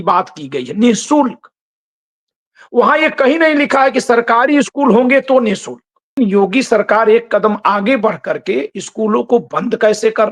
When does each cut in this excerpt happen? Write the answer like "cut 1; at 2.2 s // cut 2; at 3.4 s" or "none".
cut 1; at 6.1 s